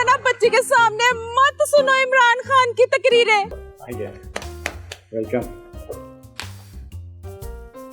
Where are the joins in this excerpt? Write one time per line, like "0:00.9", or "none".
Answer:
0:03.5